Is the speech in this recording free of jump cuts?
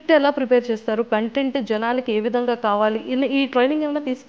yes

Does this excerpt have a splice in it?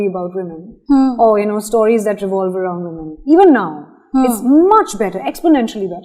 no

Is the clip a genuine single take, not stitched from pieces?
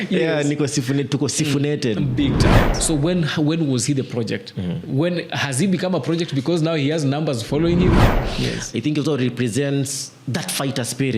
no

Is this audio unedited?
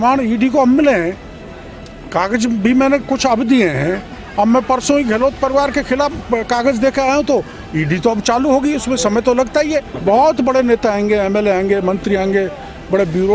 no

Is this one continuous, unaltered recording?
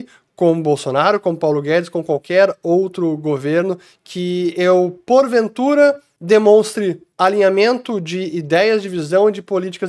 yes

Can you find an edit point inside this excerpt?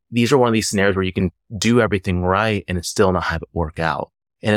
yes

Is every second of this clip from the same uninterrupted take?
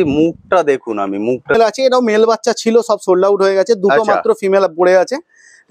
no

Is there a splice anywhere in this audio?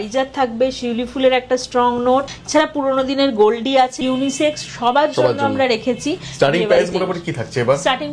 yes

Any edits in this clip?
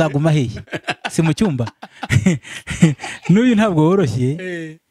no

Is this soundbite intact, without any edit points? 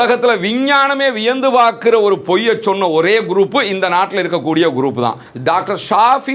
no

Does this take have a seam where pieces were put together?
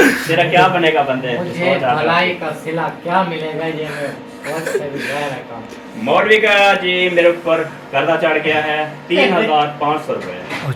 no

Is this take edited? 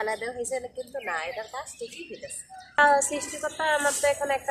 yes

